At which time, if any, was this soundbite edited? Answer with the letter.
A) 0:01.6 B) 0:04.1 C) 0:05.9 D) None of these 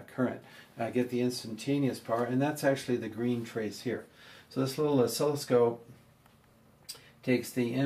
C